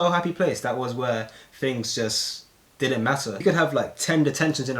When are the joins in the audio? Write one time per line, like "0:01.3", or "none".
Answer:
0:03.4